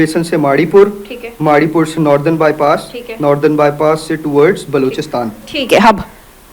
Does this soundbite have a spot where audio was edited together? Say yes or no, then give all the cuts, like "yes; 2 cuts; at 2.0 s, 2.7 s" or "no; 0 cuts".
no; 0 cuts